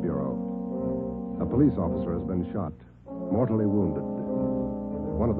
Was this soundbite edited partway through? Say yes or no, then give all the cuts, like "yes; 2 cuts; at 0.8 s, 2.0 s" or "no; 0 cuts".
yes; 1 cut; at 2.5 s